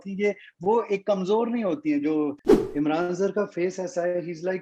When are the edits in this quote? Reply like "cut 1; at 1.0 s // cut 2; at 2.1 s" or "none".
cut 1; at 2.4 s